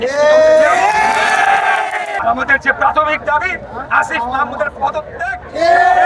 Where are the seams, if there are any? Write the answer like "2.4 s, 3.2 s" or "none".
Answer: 2.1 s